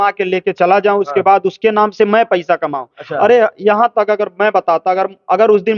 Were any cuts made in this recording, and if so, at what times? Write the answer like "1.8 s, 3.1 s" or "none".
none